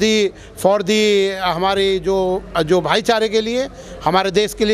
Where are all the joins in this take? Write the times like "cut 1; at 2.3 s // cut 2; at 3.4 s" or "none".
none